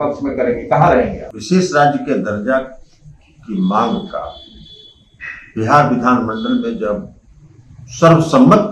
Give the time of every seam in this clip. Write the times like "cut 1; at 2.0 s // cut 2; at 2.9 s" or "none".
cut 1; at 1.3 s